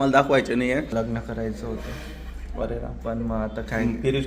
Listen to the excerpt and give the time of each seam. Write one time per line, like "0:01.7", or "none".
0:00.9